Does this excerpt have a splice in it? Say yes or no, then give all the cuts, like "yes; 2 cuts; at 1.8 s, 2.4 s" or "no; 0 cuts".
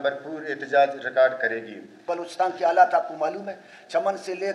yes; 1 cut; at 2.1 s